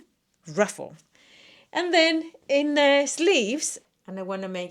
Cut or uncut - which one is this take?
cut